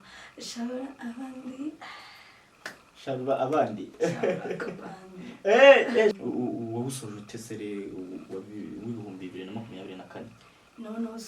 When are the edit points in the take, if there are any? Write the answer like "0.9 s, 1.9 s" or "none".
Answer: 6.1 s